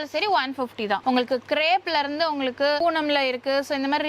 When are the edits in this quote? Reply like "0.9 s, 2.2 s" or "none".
1.0 s, 2.8 s